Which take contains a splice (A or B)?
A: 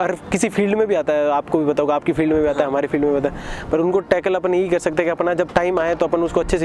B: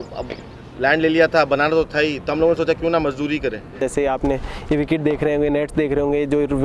B